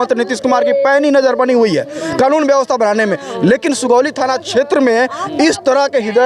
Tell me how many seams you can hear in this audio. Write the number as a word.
zero